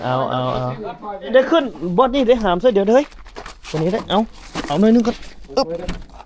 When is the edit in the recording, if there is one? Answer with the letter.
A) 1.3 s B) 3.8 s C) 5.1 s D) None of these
A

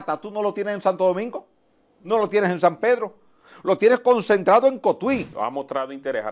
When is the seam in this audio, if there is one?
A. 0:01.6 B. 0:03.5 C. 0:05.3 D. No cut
C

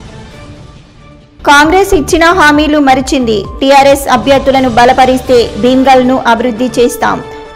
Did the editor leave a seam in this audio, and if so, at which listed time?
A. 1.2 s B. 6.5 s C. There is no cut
A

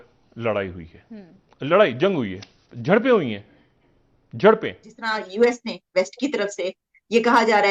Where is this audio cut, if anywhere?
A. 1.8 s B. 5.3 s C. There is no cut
B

